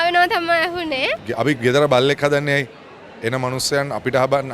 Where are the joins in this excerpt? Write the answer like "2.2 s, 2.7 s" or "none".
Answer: 1.2 s